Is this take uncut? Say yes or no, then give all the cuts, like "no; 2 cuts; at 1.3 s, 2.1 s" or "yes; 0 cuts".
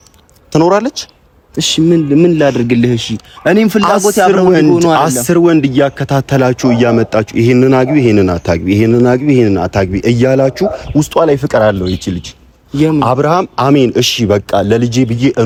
yes; 0 cuts